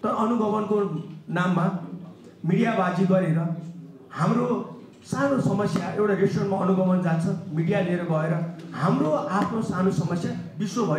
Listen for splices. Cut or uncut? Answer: uncut